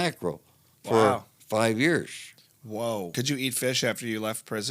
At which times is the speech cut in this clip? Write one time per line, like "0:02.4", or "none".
0:03.1